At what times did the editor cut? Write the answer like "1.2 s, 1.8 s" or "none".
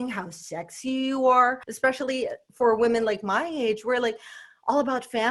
1.7 s